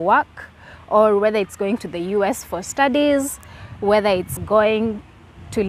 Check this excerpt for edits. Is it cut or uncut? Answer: cut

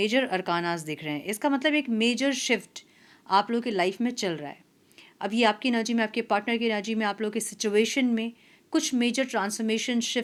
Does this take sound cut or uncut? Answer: uncut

